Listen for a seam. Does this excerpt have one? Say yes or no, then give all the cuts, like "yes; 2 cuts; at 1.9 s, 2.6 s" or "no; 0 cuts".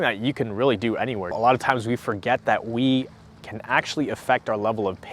yes; 1 cut; at 1.2 s